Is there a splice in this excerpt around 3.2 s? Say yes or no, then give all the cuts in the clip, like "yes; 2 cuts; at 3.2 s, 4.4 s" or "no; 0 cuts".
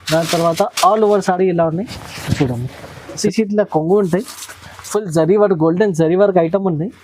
yes; 1 cut; at 3.2 s